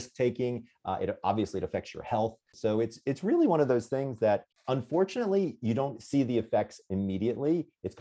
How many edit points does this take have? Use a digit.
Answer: 2